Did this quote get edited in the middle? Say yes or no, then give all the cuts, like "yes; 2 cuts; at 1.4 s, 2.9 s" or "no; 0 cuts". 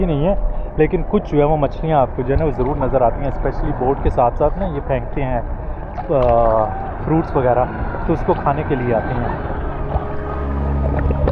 no; 0 cuts